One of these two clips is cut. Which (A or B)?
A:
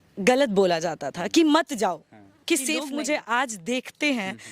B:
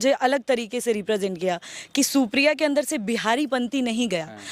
A